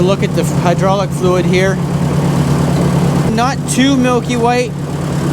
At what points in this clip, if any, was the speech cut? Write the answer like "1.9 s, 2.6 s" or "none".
3.3 s

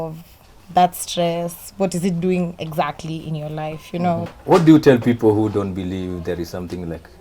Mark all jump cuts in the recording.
4.3 s

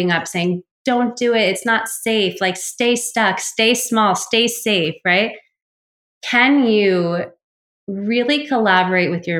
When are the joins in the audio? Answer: none

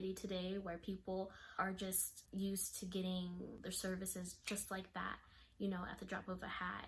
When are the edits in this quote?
1.8 s, 3.6 s

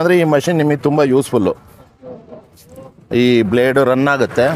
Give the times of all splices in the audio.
none

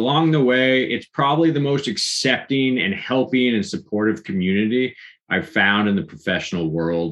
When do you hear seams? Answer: none

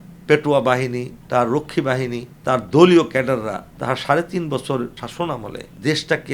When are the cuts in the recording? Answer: 1.1 s, 2.3 s, 3.7 s, 5.3 s

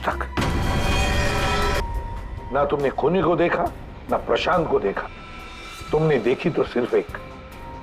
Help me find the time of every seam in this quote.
1.8 s

